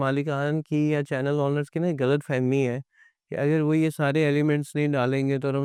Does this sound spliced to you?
no; 0 cuts

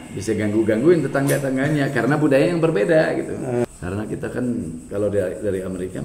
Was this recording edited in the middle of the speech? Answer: yes; 1 cut; at 3.7 s

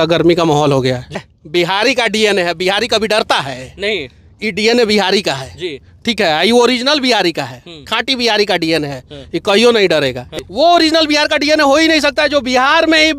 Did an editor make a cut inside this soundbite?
yes; 2 cuts; at 1.2 s, 10.3 s

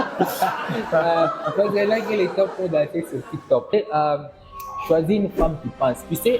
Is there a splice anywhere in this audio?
yes; 1 cut; at 3.7 s

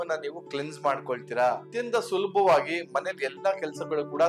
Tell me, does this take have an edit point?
yes; 1 cut; at 1.7 s

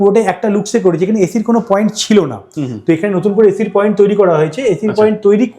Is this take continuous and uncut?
yes; 0 cuts

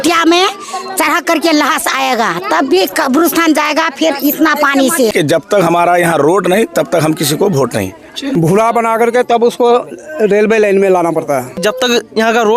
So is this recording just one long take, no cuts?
no; 3 cuts; at 5.1 s, 8.3 s, 11.5 s

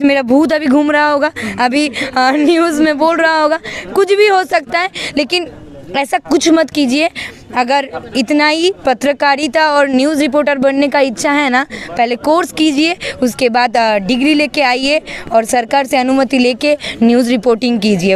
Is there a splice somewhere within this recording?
no; 0 cuts

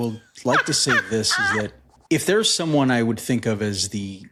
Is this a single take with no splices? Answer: yes; 0 cuts

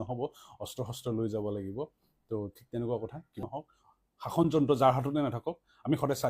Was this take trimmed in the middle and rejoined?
yes; 1 cut; at 3.4 s

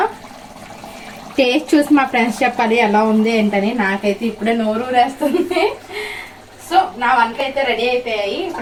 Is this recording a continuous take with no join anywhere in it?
yes; 0 cuts

